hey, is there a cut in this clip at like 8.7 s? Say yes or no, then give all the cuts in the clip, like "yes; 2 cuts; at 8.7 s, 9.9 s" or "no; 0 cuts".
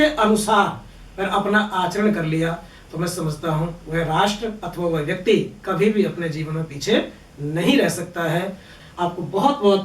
yes; 1 cut; at 8.7 s